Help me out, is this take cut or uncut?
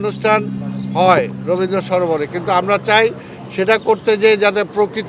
uncut